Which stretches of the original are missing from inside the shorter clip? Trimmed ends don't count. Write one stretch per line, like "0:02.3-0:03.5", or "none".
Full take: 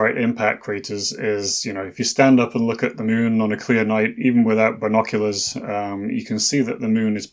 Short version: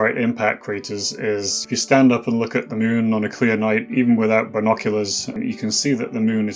0:01.6-0:01.9
0:05.6-0:06.0